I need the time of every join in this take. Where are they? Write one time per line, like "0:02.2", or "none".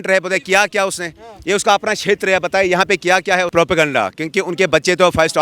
0:03.5